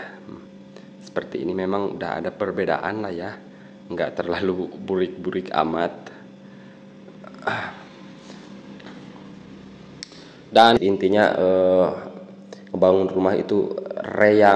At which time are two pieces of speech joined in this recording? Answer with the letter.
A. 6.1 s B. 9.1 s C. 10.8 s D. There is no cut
C